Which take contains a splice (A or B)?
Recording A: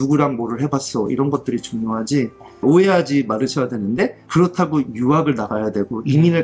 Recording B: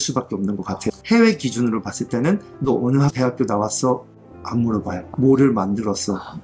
B